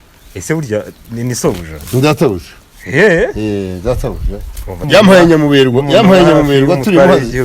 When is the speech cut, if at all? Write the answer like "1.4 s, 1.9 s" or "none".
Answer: 4.8 s